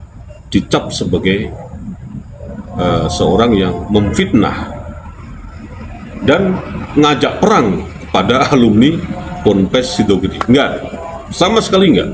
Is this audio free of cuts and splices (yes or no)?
yes